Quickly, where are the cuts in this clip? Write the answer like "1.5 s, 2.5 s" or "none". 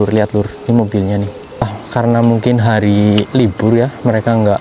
1.6 s

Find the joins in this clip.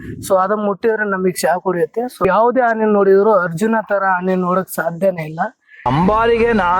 2.2 s, 5.9 s

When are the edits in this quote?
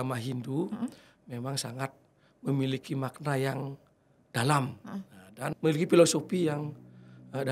5.5 s

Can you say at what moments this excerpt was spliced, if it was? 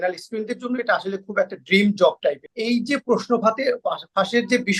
2.5 s

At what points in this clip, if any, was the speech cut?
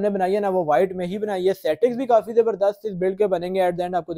none

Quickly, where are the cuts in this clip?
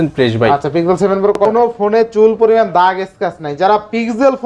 1.4 s

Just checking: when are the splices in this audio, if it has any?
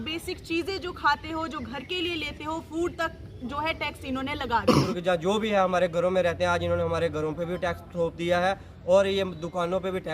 4.9 s

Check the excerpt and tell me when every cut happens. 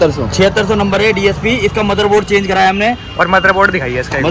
none

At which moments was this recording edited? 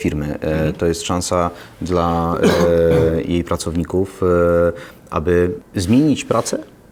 none

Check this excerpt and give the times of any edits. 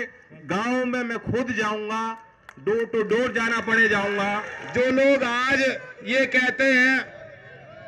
4.6 s

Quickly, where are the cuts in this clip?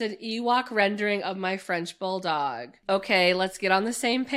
2.7 s

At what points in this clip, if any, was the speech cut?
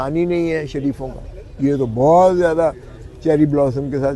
none

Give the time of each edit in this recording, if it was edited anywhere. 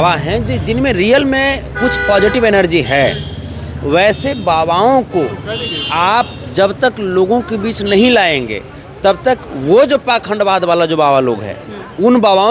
none

